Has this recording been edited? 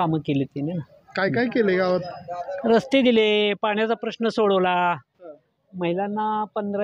no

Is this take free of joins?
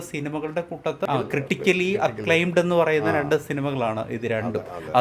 no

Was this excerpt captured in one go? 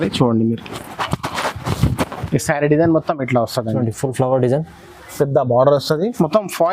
yes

